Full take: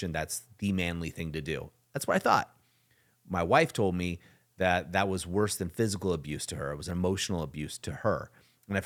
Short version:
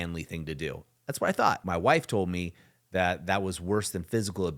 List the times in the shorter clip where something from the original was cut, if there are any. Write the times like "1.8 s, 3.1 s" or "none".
1.6 s